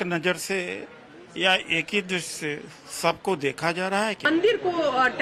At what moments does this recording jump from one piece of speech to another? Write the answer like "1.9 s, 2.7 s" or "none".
none